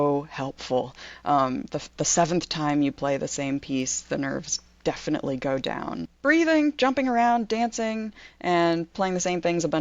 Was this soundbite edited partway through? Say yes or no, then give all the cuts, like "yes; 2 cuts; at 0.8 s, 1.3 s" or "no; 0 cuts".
yes; 1 cut; at 6.1 s